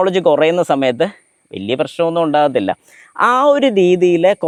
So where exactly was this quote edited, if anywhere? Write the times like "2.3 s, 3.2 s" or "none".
none